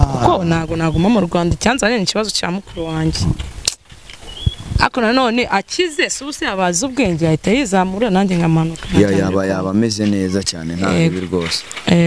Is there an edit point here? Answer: no; 0 cuts

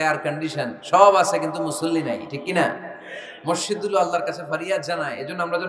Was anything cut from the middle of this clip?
no; 0 cuts

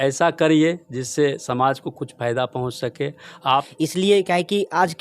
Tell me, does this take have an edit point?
yes; 1 cut; at 3.7 s

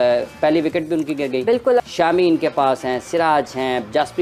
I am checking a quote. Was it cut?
yes; 1 cut; at 1.8 s

